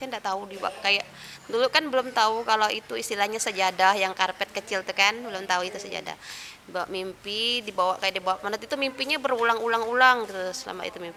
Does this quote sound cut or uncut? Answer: uncut